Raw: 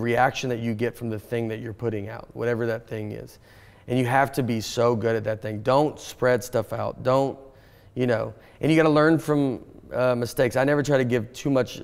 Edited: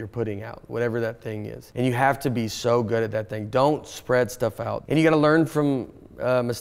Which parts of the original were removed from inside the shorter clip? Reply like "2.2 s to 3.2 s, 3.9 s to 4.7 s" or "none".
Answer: 3.2 s to 3.7 s, 6.9 s to 8.5 s